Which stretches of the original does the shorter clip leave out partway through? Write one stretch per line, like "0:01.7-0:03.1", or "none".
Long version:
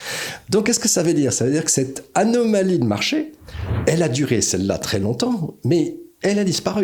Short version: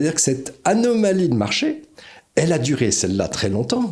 none

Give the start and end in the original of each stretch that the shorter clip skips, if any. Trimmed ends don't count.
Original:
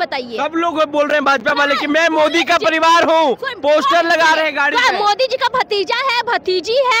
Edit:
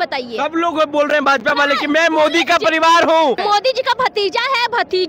0:03.4-0:05.0

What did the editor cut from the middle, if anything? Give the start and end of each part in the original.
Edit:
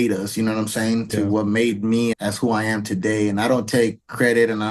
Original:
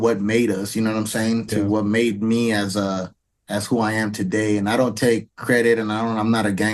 0:02.5-0:03.4

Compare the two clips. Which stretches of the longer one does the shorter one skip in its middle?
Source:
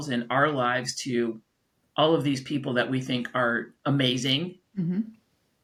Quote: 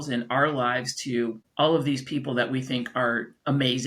0:01.4-0:01.8

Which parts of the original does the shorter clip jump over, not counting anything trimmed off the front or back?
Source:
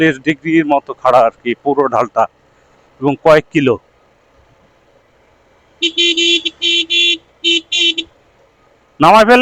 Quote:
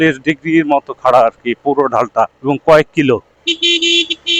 0:02.4-0:02.9
0:03.9-0:05.7

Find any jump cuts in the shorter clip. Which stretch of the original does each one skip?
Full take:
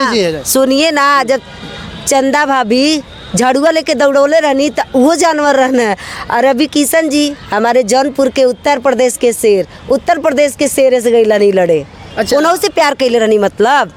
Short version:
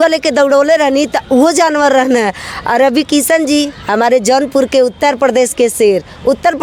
none

